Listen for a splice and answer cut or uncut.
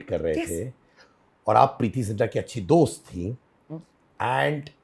uncut